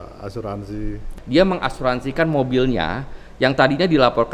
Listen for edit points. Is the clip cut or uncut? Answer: cut